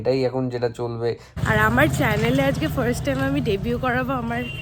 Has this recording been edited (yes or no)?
yes